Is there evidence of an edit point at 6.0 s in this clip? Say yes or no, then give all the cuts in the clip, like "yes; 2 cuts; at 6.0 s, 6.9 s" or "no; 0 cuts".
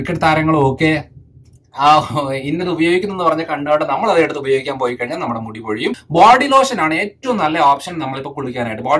yes; 1 cut; at 6.0 s